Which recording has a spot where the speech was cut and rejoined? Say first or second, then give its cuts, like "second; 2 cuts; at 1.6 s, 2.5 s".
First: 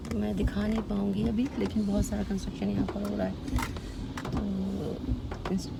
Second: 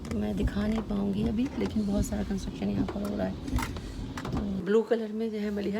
second; 1 cut; at 4.6 s